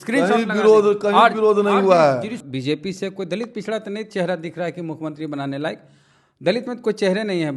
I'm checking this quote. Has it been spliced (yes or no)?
yes